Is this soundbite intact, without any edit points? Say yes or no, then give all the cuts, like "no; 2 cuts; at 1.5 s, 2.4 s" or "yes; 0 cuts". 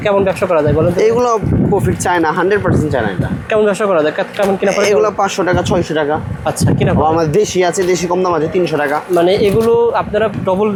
yes; 0 cuts